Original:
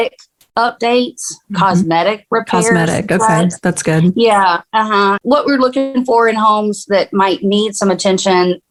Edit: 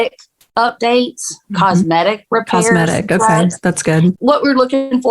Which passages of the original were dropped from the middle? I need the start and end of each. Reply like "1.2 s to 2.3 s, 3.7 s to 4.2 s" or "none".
4.1 s to 5.2 s